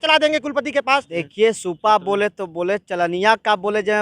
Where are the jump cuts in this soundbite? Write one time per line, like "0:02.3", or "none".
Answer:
0:01.1